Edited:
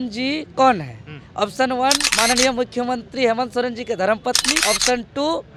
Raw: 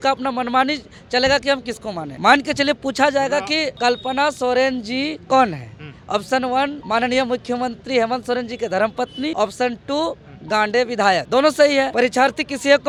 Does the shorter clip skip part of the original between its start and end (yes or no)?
no